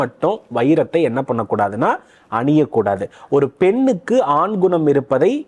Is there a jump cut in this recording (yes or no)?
no